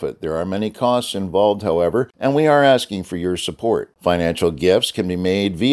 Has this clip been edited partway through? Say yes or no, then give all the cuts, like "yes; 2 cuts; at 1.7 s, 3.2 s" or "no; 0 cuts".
yes; 1 cut; at 2.1 s